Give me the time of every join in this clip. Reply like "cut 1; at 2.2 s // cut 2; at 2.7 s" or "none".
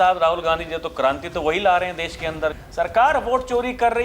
cut 1; at 2.6 s